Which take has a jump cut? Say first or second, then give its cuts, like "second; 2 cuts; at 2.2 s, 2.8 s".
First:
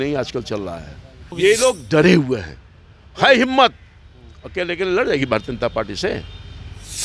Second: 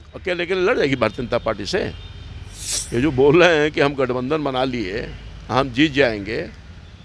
first; 1 cut; at 1.3 s